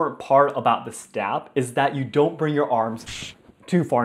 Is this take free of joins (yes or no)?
yes